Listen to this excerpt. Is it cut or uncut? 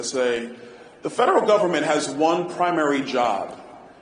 uncut